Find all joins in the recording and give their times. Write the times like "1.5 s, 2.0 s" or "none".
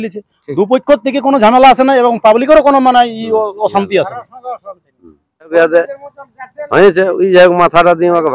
5.5 s